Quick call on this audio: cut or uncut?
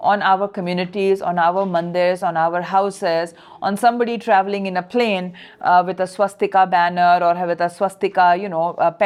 uncut